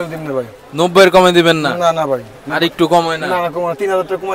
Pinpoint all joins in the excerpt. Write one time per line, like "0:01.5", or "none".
none